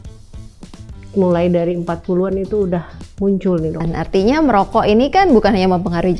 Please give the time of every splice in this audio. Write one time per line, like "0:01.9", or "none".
0:03.8